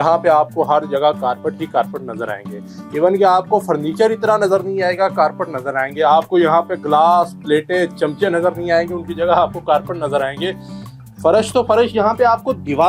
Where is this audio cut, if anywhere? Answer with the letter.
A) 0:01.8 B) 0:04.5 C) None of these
C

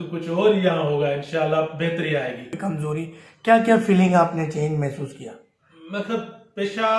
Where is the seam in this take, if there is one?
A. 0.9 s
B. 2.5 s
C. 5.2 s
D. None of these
B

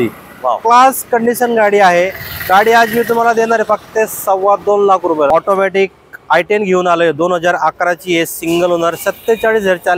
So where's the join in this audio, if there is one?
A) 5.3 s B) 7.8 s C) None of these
A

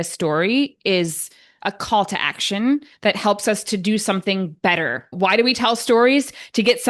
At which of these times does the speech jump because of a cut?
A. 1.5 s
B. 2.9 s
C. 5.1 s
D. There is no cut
C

